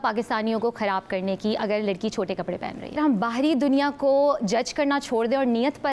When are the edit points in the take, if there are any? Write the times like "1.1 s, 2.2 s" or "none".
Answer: 3.0 s